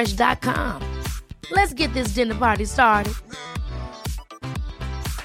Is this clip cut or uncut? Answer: uncut